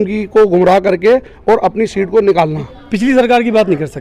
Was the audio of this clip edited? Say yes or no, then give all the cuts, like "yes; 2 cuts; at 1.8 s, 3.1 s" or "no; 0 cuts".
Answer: yes; 1 cut; at 2.7 s